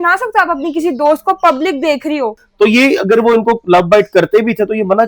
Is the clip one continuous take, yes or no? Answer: no